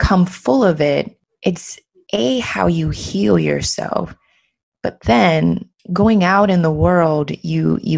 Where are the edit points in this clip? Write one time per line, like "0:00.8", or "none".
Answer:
0:01.2
0:05.8